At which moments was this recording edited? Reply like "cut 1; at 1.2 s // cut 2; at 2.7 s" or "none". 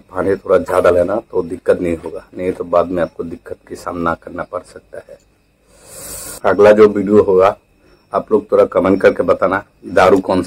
cut 1; at 6.4 s